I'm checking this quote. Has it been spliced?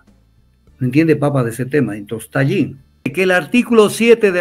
yes; 1 cut; at 3.1 s

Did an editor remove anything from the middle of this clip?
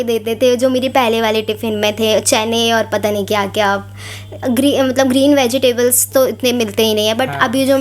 no; 0 cuts

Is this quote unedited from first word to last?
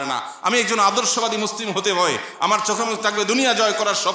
no; 1 cut; at 2.3 s

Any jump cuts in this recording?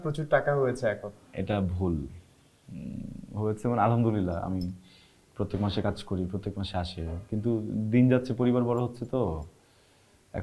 no; 0 cuts

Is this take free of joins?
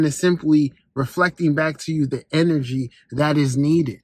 yes; 0 cuts

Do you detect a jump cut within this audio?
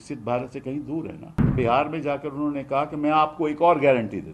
yes; 1 cut; at 1.5 s

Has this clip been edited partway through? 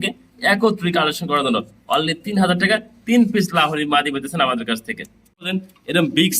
yes; 1 cut; at 5.5 s

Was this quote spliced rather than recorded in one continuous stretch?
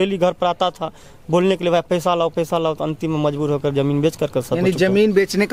no; 0 cuts

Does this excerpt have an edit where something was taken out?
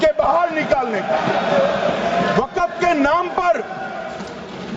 no; 0 cuts

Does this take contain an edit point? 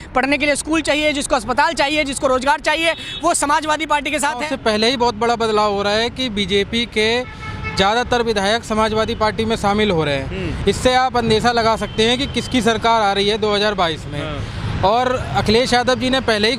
yes; 1 cut; at 4.4 s

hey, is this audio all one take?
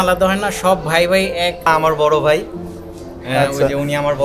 no; 1 cut; at 1.7 s

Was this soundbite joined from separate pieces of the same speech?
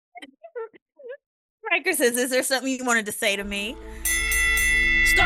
yes; 1 cut; at 4.2 s

